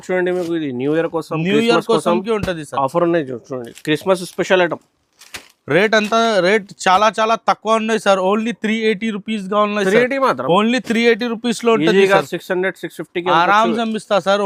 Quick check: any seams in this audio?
no; 0 cuts

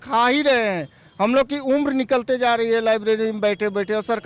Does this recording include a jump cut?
no; 0 cuts

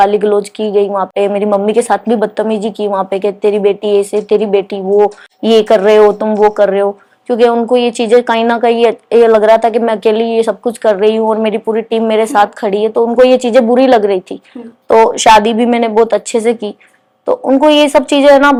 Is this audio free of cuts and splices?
yes; 0 cuts

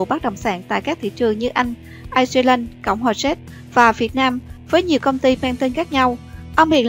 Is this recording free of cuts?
yes; 0 cuts

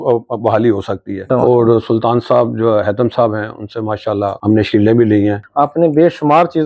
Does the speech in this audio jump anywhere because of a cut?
yes; 3 cuts; at 1.2 s, 4.4 s, 5.4 s

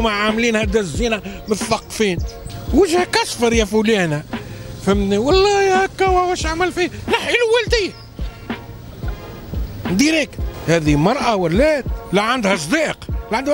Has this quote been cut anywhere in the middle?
yes; 3 cuts; at 2.3 s, 10.5 s, 11.9 s

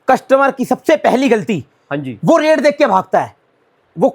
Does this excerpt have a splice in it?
no; 0 cuts

